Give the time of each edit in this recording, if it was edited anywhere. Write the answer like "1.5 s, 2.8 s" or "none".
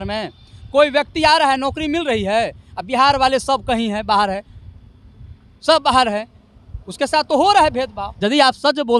8.1 s